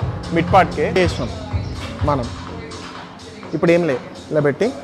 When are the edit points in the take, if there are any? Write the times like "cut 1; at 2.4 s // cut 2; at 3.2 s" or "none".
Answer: cut 1; at 1.0 s